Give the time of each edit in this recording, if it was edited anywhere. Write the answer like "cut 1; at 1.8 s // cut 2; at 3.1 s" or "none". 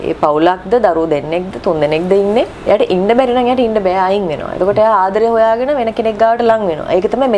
none